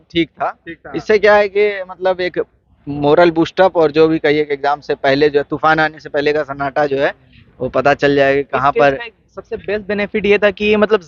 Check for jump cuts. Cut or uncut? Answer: uncut